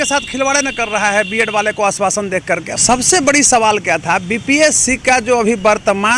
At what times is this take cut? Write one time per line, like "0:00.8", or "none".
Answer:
0:02.7